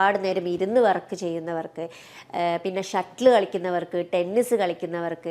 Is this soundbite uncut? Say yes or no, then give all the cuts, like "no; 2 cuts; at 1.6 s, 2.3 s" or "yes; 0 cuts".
yes; 0 cuts